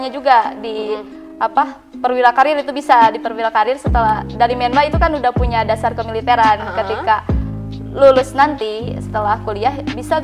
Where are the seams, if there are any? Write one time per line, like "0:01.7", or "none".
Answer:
none